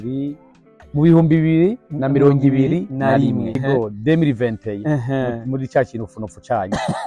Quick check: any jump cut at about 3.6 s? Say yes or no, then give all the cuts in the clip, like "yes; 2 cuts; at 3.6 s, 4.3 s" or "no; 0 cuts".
yes; 1 cut; at 3.6 s